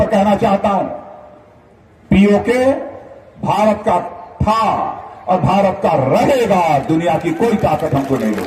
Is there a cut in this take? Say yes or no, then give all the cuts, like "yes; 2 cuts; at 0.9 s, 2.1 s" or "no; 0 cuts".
no; 0 cuts